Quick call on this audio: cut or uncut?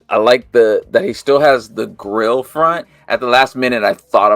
cut